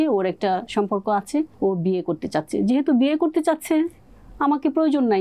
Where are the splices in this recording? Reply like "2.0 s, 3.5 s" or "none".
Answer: 1.5 s